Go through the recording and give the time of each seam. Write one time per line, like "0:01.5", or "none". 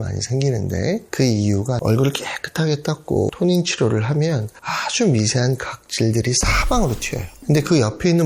0:01.8
0:03.3
0:07.3

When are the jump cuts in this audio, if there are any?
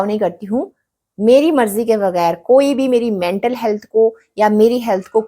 none

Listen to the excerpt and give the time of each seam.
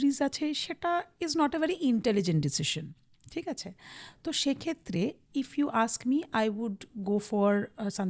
none

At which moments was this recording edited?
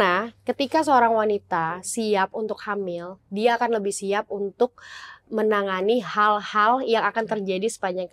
none

